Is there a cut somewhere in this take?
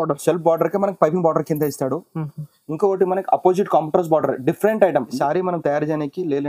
yes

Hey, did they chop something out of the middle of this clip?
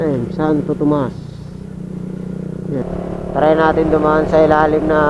yes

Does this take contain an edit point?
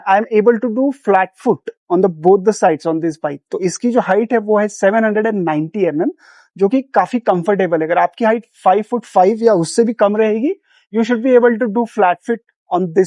no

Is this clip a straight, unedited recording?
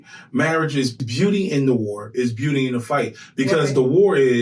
no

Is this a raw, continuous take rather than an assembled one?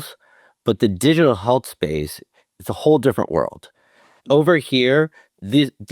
yes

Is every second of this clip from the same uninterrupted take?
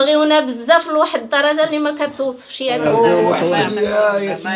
no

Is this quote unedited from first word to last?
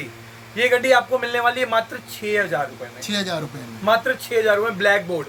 yes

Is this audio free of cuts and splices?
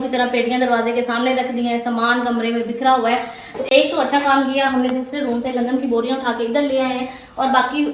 yes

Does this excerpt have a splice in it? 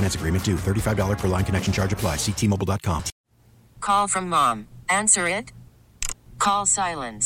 yes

